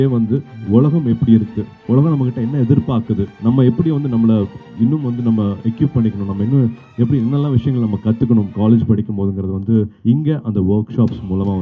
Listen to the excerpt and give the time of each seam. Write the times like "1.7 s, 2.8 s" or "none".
none